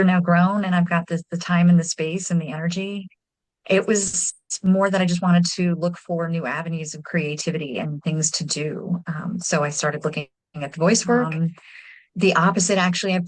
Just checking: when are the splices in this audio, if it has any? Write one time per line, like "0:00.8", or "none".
0:11.3

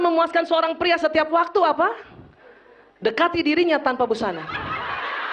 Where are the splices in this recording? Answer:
none

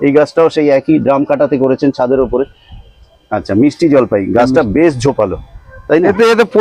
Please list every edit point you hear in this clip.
none

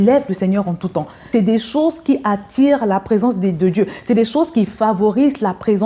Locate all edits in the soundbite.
0:01.2

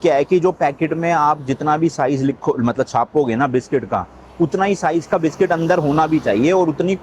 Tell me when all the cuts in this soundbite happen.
none

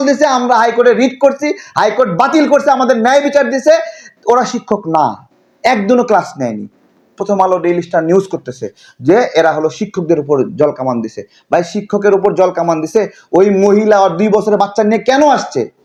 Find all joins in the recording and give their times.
none

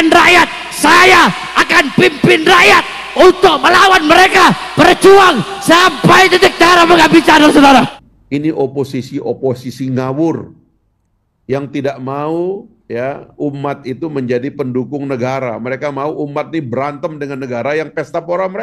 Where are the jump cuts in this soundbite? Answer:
0:07.9

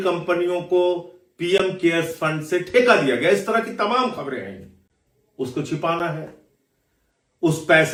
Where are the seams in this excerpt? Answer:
none

